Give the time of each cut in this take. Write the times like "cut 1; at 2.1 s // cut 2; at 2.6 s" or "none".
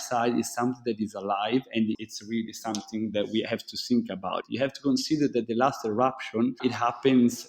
cut 1; at 1.9 s // cut 2; at 4.4 s // cut 3; at 6.6 s